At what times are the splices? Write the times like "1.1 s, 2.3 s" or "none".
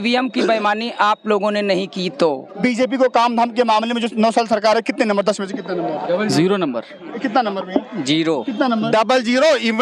2.6 s, 7.0 s